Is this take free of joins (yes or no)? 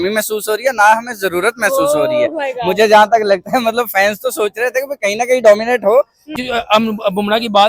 no